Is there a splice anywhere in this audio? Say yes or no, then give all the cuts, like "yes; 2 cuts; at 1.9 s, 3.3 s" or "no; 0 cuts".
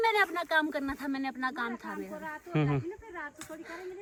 no; 0 cuts